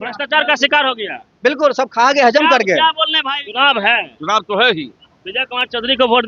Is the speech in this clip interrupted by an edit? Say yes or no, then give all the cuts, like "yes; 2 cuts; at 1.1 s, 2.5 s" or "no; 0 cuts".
yes; 1 cut; at 3.3 s